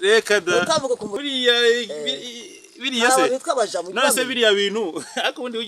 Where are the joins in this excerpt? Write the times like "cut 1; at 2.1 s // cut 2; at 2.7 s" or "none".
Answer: cut 1; at 1.1 s